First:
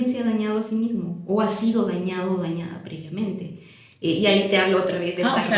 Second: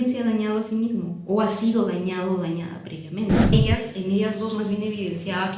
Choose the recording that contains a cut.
second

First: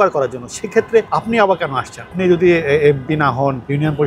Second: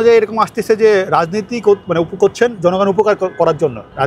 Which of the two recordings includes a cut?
first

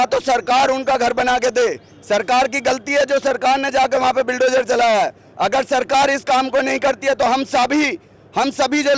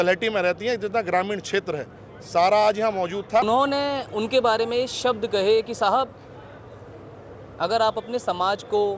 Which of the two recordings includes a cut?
second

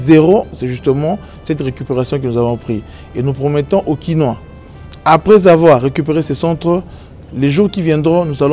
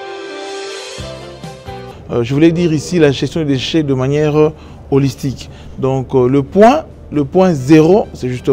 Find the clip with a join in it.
second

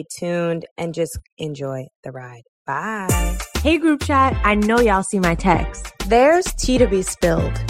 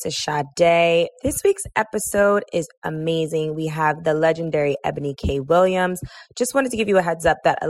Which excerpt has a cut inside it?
second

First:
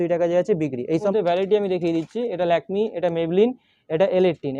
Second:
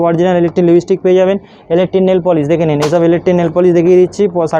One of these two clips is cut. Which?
first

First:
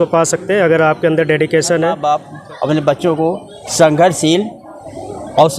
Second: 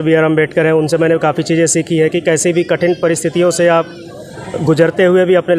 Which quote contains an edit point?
first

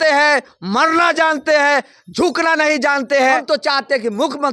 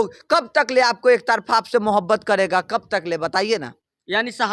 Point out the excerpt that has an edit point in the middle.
first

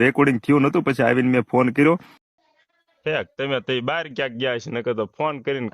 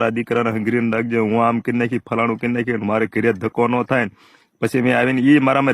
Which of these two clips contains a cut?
first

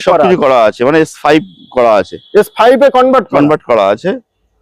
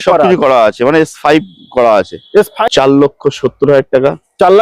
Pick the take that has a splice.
second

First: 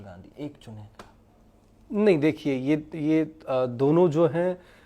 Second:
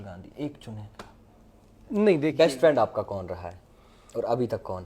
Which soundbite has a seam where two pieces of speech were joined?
second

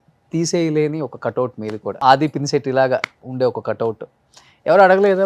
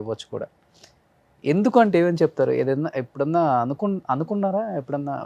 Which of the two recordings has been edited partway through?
first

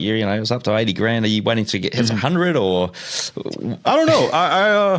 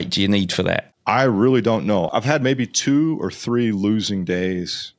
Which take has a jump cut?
second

